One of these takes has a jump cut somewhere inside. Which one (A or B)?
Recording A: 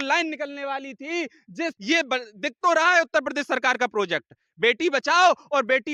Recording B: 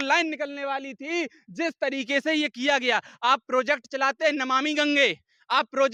A